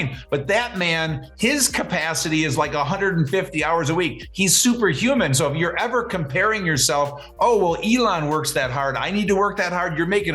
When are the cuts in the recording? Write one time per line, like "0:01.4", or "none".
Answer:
none